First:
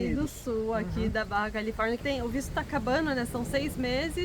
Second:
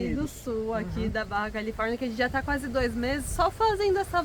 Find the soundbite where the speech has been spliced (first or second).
first